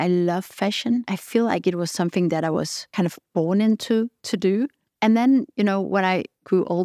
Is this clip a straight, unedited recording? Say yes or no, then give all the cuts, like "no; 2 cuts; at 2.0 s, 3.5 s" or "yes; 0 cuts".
no; 2 cuts; at 2.8 s, 4.8 s